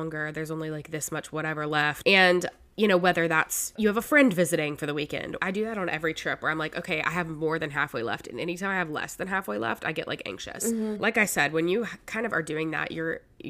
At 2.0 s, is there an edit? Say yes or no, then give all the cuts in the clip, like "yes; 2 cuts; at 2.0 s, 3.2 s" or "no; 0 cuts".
yes; 4 cuts; at 2.0 s, 3.7 s, 5.0 s, 10.5 s